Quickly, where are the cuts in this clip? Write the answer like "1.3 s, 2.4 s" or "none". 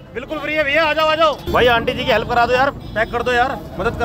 1.5 s